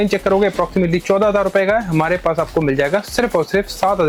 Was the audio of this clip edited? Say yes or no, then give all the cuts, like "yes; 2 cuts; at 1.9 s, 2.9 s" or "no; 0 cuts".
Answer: no; 0 cuts